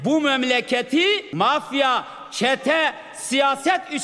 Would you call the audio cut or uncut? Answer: cut